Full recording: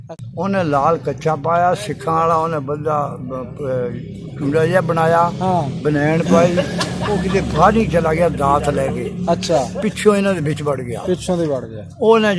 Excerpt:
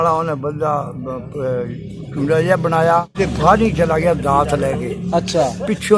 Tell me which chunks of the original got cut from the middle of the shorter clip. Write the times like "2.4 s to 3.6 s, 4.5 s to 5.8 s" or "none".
5.3 s to 7.2 s